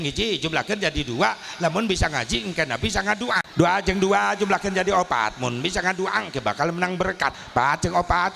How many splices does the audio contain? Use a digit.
2